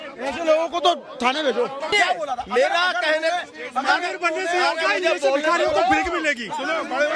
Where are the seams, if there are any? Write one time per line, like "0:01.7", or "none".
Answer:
0:01.9